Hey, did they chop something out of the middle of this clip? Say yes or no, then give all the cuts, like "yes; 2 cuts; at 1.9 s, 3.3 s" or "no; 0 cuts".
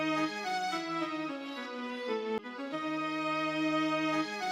no; 0 cuts